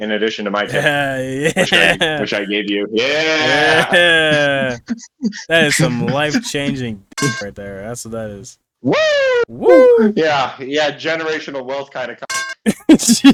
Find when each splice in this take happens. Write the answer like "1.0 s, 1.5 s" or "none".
none